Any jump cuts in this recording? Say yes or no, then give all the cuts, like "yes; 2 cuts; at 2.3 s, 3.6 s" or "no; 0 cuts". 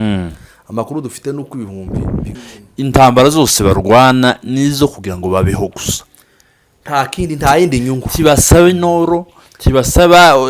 yes; 1 cut; at 2.3 s